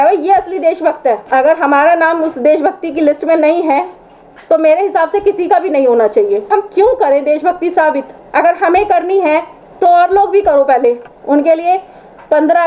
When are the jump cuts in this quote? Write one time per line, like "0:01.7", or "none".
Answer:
0:01.2
0:06.5
0:08.1
0:09.6
0:11.1